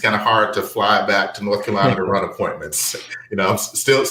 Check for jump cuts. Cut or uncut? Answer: uncut